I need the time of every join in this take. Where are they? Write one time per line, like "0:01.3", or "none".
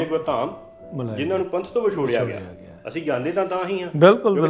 none